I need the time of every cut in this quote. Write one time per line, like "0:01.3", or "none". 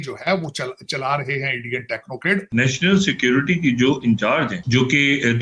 0:02.5
0:04.6